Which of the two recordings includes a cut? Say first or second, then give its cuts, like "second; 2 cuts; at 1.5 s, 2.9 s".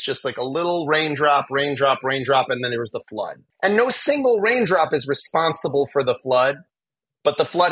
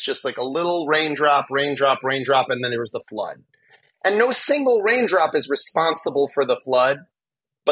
first; 1 cut; at 3.4 s